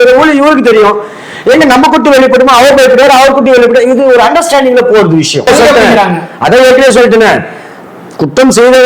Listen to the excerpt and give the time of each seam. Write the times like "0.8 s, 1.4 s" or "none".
5.5 s